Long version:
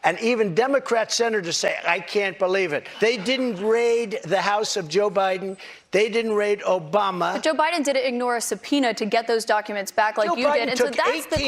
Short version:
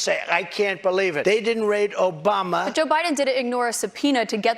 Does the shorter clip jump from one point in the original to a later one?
yes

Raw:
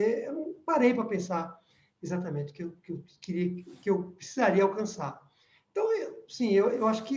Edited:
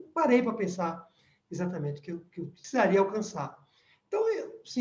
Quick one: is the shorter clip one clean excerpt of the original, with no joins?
no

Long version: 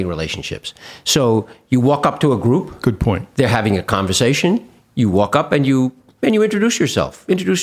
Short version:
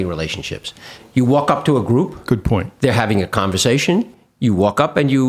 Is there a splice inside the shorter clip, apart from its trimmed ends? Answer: yes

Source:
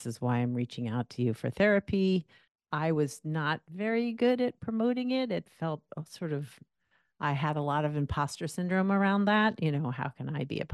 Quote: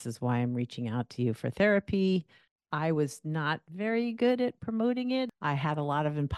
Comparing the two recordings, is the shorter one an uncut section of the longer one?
no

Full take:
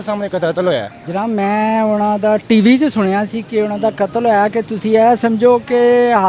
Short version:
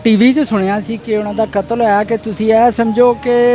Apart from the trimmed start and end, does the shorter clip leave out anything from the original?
no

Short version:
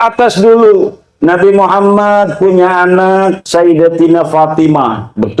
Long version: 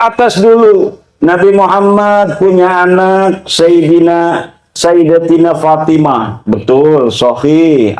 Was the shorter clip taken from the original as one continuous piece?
no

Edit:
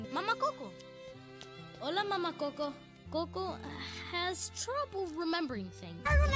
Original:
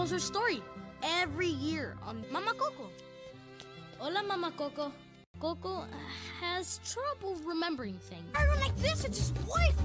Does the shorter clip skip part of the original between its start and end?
yes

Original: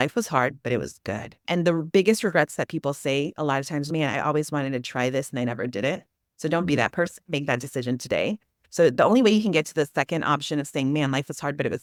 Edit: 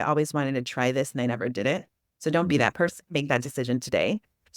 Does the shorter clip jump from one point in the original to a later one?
no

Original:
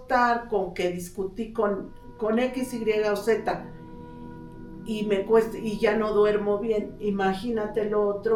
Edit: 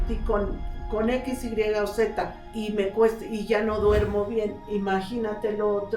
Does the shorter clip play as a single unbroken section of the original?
no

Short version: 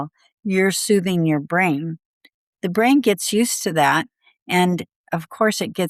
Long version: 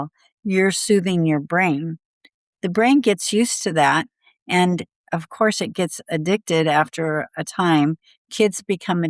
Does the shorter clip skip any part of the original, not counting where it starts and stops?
no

